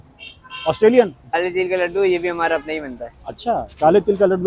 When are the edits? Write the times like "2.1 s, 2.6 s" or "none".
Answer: 1.4 s